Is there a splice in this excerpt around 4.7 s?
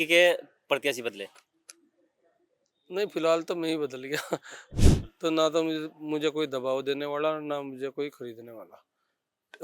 yes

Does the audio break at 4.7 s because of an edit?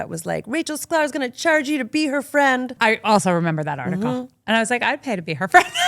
no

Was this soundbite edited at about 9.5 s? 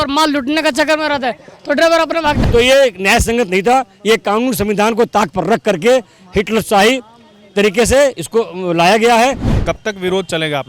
yes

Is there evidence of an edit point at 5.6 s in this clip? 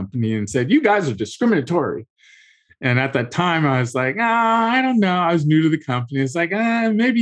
no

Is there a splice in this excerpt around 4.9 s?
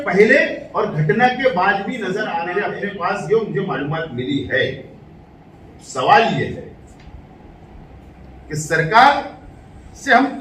no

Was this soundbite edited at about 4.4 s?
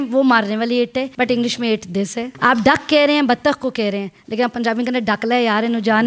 no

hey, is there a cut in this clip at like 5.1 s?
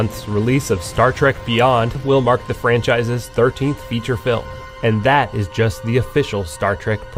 no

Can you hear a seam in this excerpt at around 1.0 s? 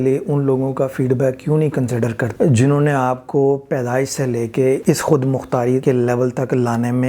no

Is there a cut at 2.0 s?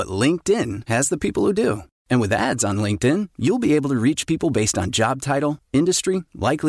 no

